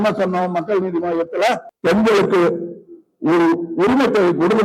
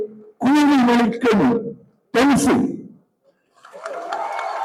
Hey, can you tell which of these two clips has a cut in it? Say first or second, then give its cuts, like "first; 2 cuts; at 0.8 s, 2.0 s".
first; 1 cut; at 1.7 s